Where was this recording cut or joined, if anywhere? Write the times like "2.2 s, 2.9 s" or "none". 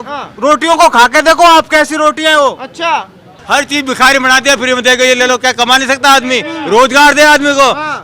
3.4 s